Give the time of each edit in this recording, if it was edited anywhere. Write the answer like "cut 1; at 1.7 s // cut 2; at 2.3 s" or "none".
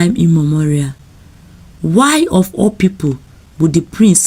none